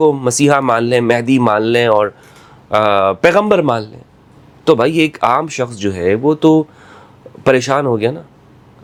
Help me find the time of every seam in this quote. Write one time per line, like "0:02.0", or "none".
none